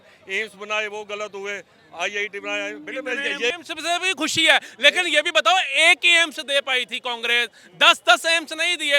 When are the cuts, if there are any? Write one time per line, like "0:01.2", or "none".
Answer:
0:03.5